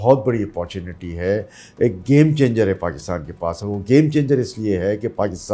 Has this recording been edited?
no; 0 cuts

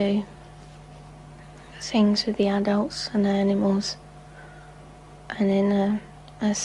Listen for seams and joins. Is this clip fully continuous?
no; 1 cut; at 1.4 s

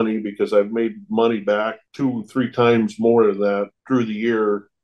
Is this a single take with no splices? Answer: yes; 0 cuts

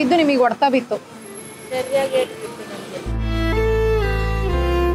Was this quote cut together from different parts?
no; 0 cuts

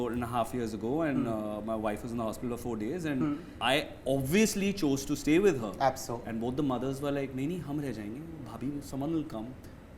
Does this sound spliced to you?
yes; 1 cut; at 3.5 s

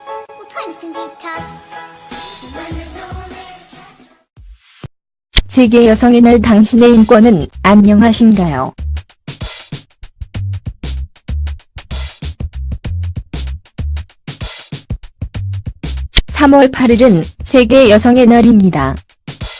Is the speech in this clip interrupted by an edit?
no; 0 cuts

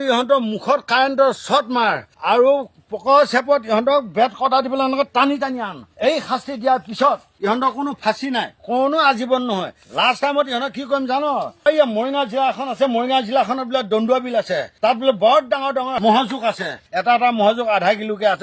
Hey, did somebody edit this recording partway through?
no; 0 cuts

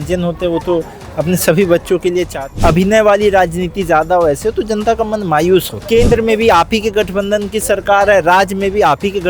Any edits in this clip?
yes; 2 cuts; at 2.3 s, 5.8 s

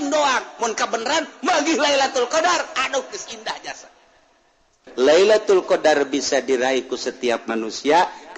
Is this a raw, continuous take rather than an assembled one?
no; 1 cut; at 4.8 s

